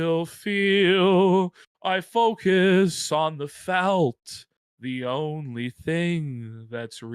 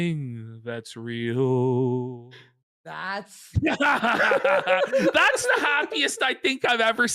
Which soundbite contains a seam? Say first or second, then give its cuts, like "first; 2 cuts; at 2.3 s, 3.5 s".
second; 1 cut; at 3.0 s